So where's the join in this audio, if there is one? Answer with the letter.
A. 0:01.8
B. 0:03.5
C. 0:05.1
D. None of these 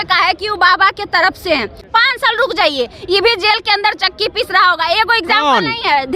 A